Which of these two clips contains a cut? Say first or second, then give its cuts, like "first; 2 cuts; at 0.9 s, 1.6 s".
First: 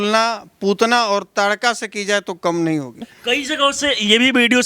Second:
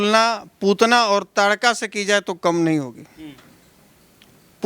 first; 1 cut; at 3.1 s